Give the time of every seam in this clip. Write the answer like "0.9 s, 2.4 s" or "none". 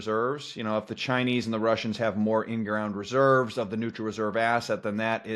none